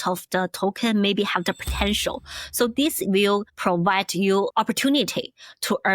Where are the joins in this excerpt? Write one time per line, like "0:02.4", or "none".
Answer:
0:04.5